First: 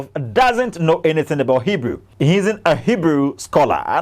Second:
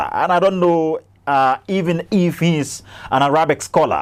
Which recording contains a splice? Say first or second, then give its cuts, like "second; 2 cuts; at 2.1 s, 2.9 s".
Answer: first; 1 cut; at 2.1 s